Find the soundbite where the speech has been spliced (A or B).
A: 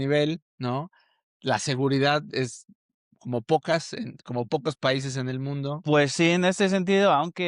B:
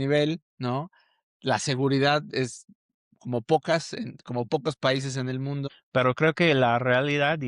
B